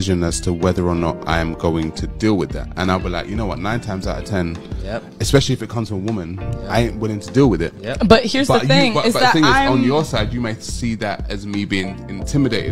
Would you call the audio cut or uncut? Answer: cut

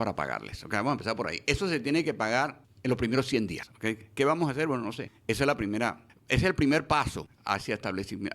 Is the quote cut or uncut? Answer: cut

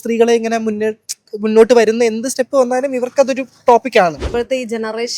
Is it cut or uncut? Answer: cut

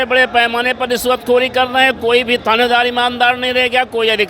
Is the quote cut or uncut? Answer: uncut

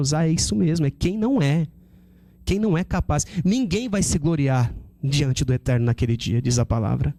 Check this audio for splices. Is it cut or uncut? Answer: uncut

